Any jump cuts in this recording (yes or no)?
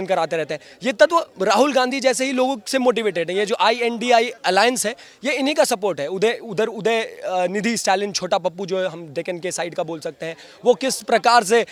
no